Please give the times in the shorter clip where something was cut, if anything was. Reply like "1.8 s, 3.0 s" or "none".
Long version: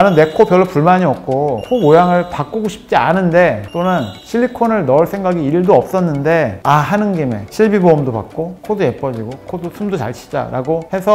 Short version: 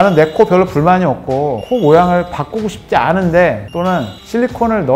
none